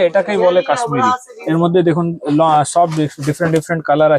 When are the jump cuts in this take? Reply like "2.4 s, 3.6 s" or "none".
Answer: 1.3 s

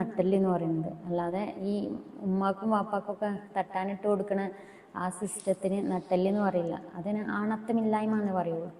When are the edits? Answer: none

